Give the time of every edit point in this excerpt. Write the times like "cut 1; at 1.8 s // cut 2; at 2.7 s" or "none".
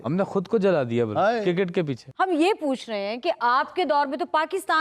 cut 1; at 2.0 s